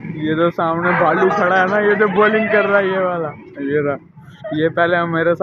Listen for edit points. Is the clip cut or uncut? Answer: cut